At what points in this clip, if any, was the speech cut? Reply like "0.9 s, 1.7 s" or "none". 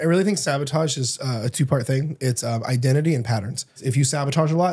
3.8 s